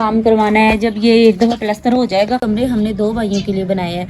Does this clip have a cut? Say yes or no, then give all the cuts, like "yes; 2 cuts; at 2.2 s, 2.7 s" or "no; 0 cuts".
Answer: yes; 1 cut; at 2.4 s